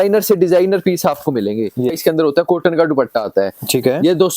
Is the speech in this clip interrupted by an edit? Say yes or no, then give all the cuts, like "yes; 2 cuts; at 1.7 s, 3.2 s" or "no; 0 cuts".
yes; 1 cut; at 2.0 s